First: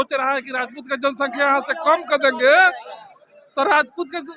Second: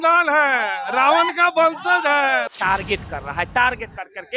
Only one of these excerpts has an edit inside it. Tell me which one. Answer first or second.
second